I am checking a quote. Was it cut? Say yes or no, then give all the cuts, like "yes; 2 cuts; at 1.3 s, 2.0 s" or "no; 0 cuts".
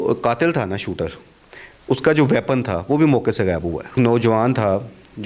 yes; 1 cut; at 4.0 s